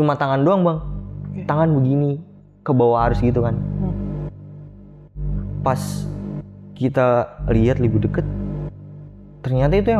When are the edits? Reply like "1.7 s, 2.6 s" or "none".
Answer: none